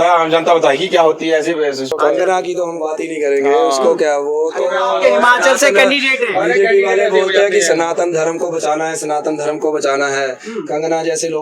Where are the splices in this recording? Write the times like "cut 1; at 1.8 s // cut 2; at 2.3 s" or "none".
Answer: cut 1; at 1.9 s